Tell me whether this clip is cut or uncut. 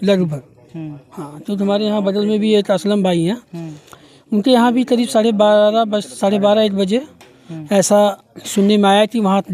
uncut